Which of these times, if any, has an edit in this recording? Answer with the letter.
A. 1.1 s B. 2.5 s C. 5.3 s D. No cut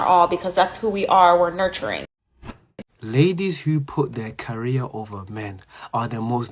B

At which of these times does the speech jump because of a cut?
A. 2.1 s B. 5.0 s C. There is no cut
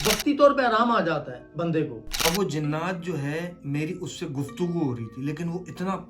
A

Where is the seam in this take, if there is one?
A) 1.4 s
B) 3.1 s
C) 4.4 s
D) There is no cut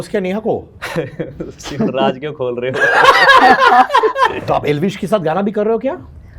C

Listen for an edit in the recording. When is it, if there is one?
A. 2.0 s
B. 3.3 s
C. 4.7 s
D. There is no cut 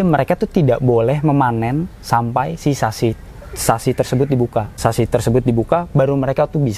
C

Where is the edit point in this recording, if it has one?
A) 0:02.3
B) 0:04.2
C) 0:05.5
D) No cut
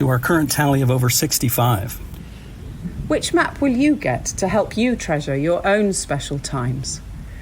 A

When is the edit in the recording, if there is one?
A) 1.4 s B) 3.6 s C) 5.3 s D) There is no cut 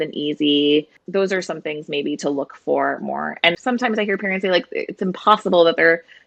B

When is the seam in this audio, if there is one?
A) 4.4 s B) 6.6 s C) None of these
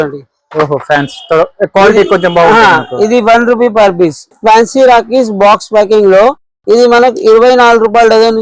A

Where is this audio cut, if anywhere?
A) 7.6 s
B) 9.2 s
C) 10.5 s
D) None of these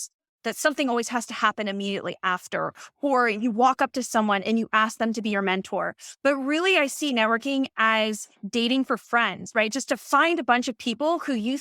D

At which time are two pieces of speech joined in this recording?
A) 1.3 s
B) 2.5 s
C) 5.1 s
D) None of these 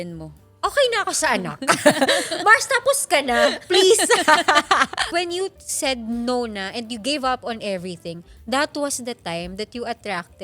C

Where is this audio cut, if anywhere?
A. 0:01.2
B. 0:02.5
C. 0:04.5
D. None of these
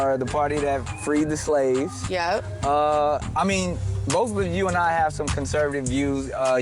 B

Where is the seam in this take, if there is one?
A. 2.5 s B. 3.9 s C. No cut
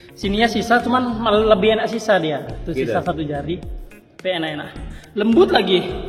C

